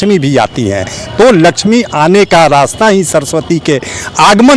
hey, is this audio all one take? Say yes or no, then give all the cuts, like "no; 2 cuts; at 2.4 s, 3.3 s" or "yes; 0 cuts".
yes; 0 cuts